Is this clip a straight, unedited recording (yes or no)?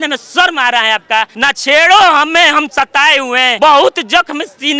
no